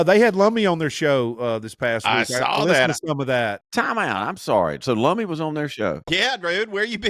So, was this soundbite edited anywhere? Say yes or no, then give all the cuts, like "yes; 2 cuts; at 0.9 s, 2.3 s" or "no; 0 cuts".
no; 0 cuts